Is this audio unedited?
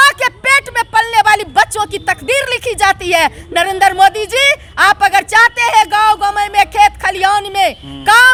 yes; 0 cuts

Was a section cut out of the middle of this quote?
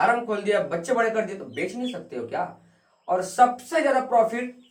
no; 0 cuts

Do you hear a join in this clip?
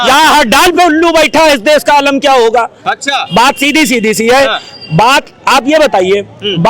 no; 0 cuts

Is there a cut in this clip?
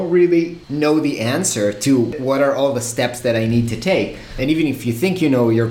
no; 0 cuts

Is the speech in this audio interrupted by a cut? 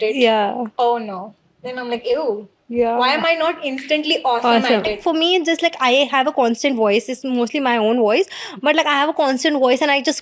yes; 1 cut; at 5.0 s

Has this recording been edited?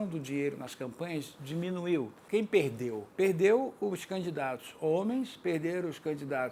yes; 2 cuts; at 2.2 s, 3.1 s

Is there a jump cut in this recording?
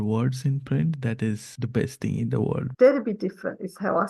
yes; 2 cuts; at 1.5 s, 2.7 s

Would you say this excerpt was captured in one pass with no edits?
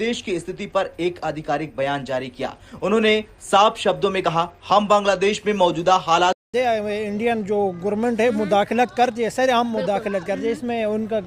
no; 1 cut; at 6.4 s

